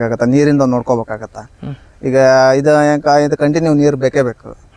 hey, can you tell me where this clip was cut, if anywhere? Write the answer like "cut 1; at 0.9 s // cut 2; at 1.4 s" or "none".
none